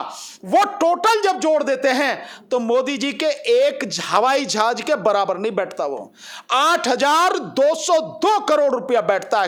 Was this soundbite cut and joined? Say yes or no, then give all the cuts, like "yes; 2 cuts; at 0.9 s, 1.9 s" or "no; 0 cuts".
no; 0 cuts